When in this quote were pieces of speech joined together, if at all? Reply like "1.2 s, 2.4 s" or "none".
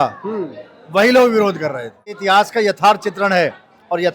2.2 s